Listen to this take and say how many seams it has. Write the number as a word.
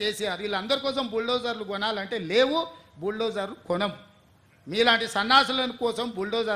zero